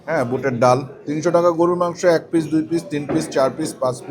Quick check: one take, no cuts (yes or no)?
no